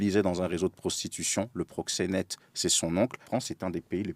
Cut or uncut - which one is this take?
cut